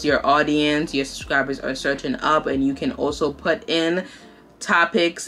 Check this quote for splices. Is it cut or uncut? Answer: uncut